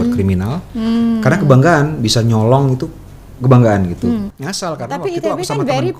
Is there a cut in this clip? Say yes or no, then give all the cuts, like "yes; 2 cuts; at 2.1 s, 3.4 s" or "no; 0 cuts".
yes; 1 cut; at 4.3 s